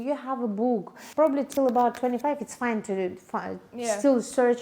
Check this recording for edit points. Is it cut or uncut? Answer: cut